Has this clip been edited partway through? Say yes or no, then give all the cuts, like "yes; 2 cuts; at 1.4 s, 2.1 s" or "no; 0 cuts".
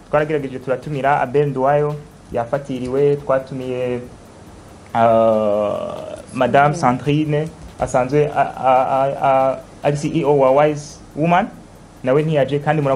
no; 0 cuts